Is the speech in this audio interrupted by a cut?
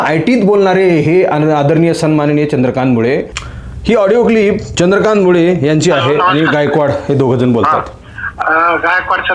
yes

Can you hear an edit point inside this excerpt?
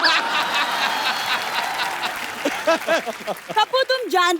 yes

